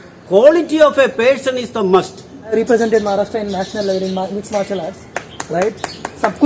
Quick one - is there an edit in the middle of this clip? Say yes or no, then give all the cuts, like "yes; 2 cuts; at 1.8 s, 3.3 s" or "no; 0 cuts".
yes; 1 cut; at 2.5 s